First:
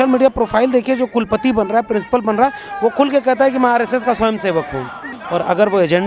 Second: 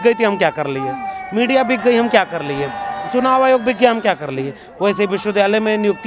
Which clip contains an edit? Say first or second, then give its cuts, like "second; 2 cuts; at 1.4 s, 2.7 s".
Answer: first; 1 cut; at 5.1 s